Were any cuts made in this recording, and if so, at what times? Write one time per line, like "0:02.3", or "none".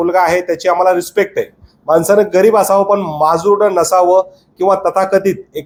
none